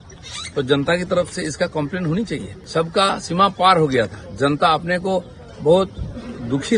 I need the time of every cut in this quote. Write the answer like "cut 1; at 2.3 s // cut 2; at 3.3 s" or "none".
cut 1; at 2.6 s